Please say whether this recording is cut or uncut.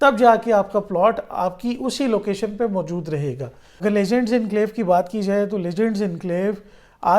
cut